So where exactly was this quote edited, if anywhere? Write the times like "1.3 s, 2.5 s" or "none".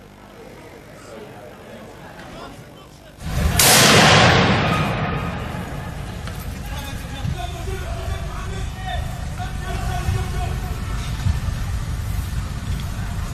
none